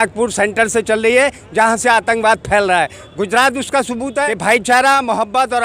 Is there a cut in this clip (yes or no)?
yes